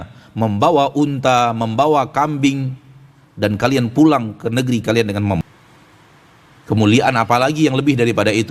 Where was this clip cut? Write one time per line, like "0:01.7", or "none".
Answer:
0:05.4